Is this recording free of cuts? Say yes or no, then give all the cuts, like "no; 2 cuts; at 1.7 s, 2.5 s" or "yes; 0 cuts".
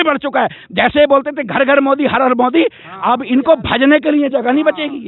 yes; 0 cuts